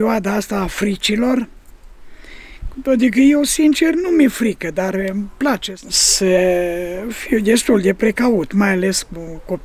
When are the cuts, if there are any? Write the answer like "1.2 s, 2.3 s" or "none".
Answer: 5.6 s